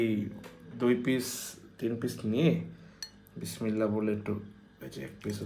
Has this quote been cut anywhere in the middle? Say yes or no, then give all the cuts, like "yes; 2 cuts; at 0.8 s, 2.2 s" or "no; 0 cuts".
no; 0 cuts